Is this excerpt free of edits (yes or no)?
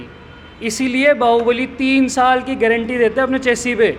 yes